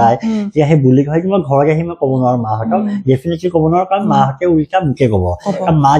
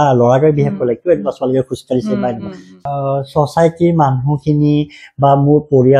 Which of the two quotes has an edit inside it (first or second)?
second